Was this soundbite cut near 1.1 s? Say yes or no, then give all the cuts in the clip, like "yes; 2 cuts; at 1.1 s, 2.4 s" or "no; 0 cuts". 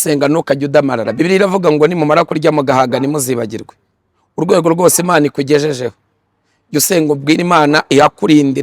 yes; 1 cut; at 1.1 s